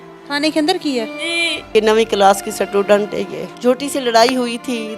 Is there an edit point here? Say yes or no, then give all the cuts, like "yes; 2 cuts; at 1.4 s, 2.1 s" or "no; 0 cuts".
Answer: yes; 2 cuts; at 1.7 s, 3.5 s